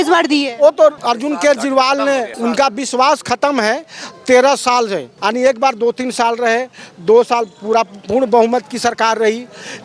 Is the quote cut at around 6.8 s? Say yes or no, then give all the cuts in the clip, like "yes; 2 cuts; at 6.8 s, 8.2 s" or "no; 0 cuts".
no; 3 cuts; at 1.0 s, 2.3 s, 5.1 s